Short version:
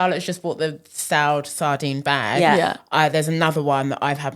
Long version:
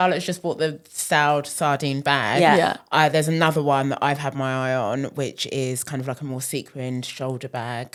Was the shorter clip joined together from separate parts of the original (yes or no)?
no